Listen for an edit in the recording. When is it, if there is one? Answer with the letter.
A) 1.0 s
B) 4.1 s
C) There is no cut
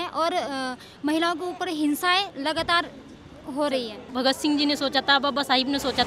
B